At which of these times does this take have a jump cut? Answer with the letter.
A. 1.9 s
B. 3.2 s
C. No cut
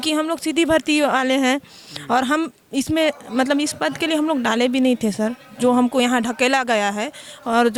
C